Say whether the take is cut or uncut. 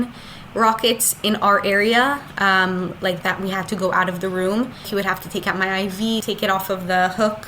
cut